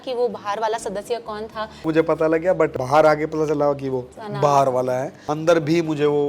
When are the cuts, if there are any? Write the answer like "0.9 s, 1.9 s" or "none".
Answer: 1.9 s, 2.8 s, 4.2 s, 5.2 s